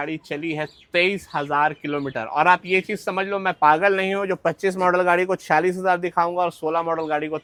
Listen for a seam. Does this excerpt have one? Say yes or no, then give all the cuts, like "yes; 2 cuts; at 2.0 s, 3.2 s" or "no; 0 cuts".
no; 0 cuts